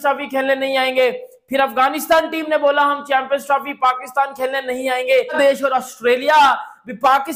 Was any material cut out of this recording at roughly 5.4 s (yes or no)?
yes